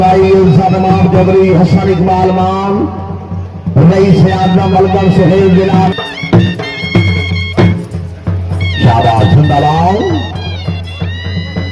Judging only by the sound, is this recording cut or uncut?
cut